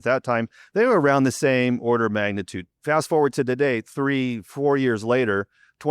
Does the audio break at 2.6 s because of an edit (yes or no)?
yes